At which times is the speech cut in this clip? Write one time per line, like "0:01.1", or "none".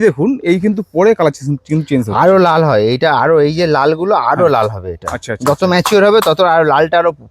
none